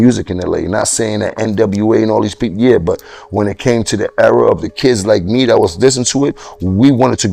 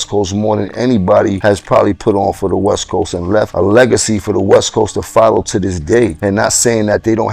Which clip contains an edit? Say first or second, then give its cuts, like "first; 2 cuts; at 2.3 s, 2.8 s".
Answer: second; 3 cuts; at 1.4 s, 3.5 s, 6.2 s